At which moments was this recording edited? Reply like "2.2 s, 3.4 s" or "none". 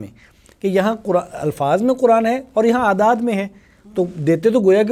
none